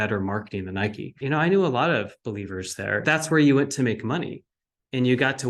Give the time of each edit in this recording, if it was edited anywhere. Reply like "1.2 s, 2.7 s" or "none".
1.1 s, 3.0 s